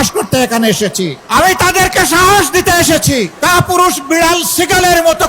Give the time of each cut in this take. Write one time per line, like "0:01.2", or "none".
0:01.2
0:03.3

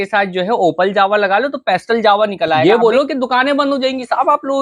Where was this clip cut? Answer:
0:02.6

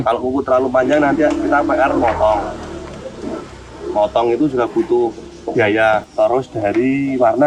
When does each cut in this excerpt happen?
0:06.1

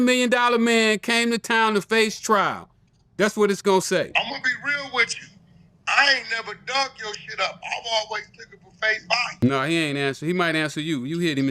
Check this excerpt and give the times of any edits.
0:09.3

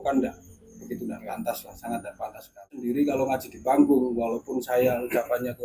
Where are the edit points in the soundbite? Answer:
none

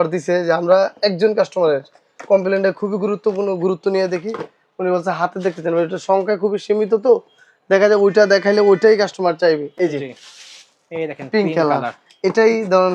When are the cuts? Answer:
none

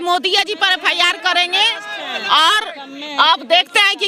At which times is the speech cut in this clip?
none

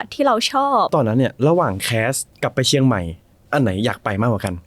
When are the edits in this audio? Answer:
0:00.9
0:02.3

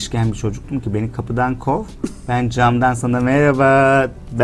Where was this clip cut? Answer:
none

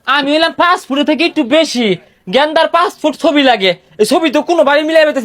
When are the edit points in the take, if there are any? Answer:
none

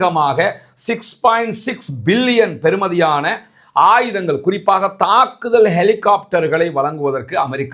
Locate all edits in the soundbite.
none

